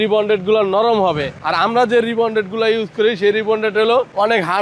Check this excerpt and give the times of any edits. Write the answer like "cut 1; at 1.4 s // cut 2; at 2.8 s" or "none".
none